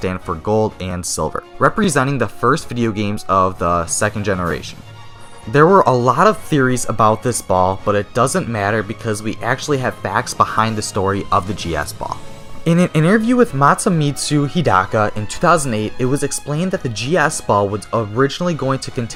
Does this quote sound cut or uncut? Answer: uncut